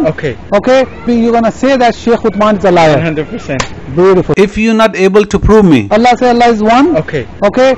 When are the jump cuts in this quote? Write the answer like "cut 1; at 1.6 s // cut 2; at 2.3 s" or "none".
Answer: cut 1; at 4.3 s